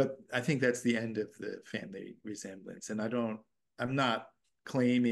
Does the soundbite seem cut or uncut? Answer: uncut